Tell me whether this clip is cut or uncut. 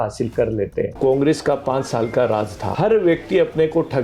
cut